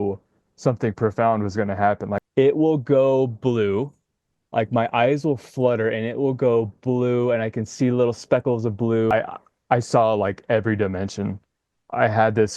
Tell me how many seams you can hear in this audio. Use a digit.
2